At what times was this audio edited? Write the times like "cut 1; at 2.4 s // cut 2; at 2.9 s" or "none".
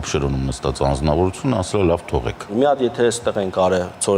cut 1; at 2.5 s